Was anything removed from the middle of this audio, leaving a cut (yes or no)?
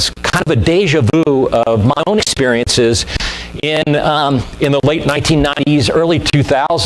yes